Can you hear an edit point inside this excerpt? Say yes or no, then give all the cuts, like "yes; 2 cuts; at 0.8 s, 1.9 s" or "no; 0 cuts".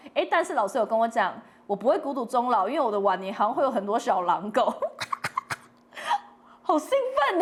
no; 0 cuts